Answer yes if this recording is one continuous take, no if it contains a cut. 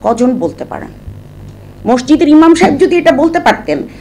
yes